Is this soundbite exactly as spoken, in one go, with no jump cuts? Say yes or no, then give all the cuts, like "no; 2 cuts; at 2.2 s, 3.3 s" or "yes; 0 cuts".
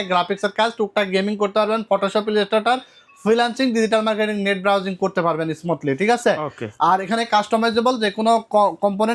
yes; 0 cuts